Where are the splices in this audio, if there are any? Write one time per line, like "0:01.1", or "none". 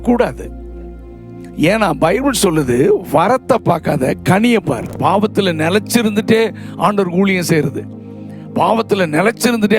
0:04.9